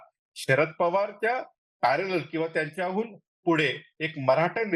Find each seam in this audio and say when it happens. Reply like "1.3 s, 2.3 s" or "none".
none